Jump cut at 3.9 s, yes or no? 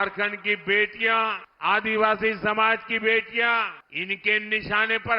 yes